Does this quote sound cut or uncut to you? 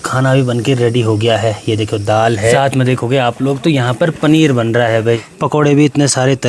cut